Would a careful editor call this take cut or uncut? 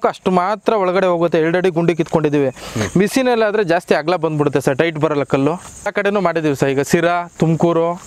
cut